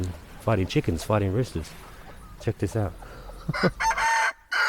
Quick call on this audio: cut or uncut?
cut